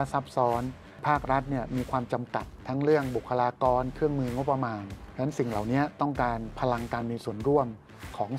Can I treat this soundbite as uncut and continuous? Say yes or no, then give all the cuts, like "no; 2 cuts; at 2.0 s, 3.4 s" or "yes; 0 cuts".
yes; 0 cuts